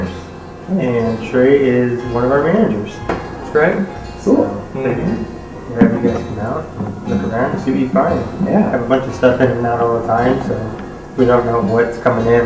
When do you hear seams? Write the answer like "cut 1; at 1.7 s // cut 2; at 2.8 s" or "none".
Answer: none

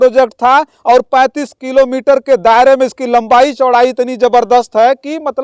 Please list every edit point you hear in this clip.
none

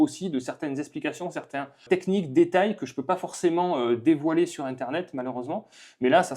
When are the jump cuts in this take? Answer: cut 1; at 1.8 s

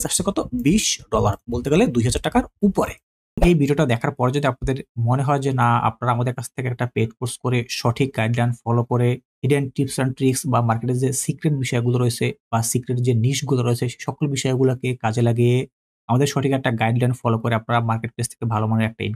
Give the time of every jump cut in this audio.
cut 1; at 3.4 s

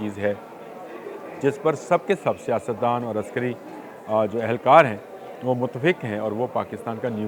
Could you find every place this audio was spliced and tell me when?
none

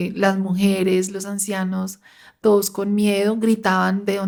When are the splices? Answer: none

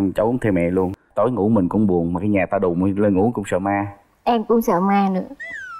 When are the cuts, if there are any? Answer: cut 1; at 1.0 s

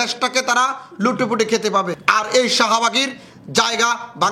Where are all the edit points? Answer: cut 1; at 2.0 s

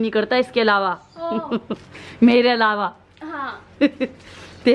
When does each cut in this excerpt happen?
none

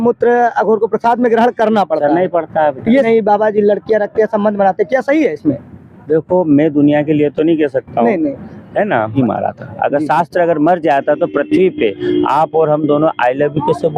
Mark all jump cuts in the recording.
cut 1; at 3.1 s // cut 2; at 9.1 s

